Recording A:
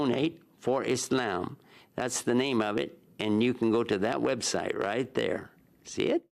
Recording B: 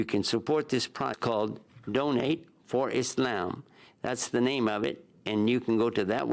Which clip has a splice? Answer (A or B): B